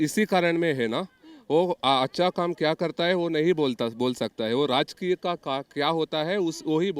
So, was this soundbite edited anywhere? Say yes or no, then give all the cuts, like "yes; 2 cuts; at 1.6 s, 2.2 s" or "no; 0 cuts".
no; 0 cuts